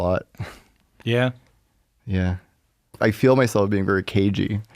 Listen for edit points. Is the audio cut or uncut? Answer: cut